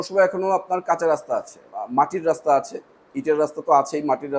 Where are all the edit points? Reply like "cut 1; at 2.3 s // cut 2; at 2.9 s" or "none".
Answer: cut 1; at 1.7 s